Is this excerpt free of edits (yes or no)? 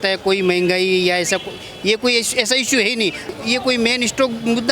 no